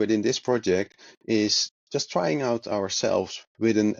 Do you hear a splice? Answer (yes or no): no